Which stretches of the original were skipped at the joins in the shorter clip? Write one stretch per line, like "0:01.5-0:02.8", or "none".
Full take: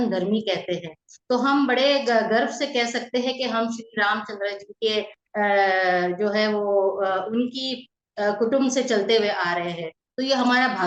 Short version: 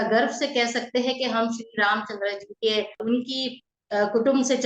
0:05.2-0:07.3

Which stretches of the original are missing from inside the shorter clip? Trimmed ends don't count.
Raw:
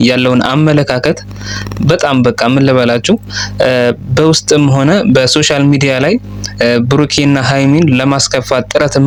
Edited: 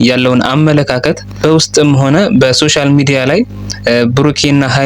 0:01.3-0:04.0

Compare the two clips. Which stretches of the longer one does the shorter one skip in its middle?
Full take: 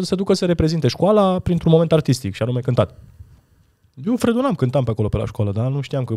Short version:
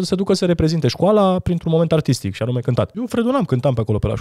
0:03.0-0:04.1

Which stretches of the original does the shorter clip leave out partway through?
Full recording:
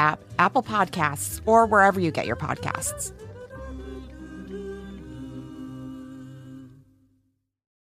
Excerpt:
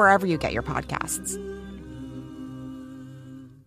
0:02.8-0:04.2

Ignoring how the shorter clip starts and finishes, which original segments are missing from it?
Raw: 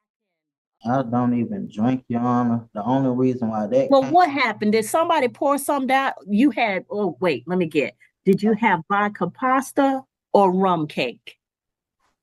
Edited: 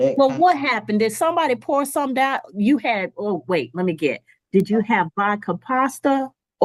none

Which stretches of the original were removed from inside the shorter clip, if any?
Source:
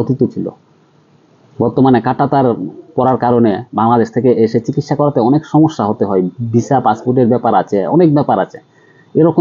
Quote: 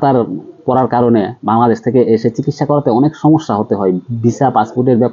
none

